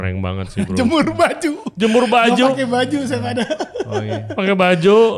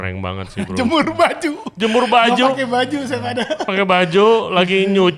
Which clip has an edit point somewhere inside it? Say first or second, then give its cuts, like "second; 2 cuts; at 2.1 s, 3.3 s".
second; 1 cut; at 3.6 s